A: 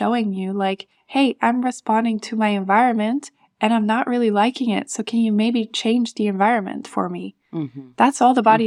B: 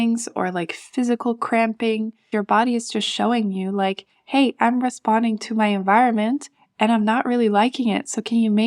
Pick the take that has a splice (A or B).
B